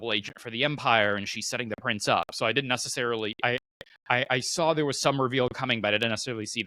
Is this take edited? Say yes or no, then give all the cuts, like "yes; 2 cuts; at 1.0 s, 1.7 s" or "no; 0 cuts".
no; 0 cuts